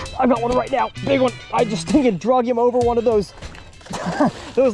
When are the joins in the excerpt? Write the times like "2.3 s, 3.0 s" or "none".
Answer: 1.0 s